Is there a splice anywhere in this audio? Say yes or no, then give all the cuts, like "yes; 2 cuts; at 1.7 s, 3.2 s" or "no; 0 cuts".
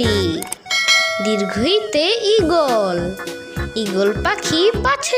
no; 0 cuts